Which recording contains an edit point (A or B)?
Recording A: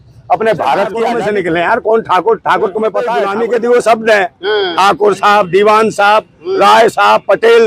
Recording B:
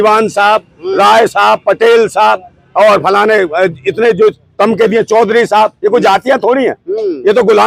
A